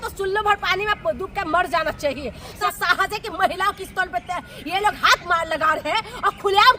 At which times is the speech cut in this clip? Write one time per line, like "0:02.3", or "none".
0:02.4